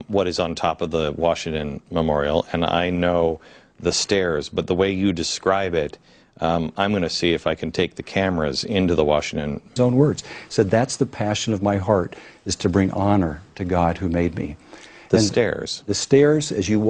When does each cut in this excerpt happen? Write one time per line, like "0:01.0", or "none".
none